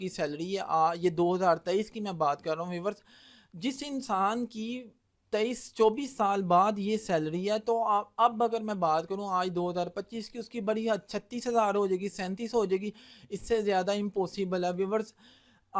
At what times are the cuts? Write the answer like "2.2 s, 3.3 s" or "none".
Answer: none